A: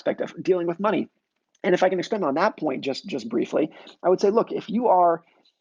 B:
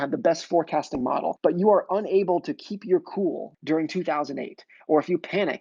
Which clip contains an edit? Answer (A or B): B